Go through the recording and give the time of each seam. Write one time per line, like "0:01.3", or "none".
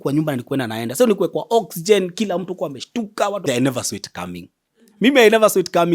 0:03.4